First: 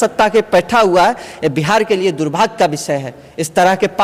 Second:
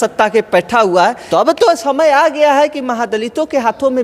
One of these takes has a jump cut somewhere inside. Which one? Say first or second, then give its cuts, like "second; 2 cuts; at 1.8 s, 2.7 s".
second; 1 cut; at 1.2 s